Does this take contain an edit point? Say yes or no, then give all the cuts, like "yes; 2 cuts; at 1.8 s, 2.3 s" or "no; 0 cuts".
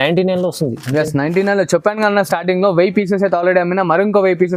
no; 0 cuts